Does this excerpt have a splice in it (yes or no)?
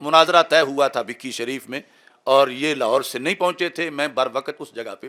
no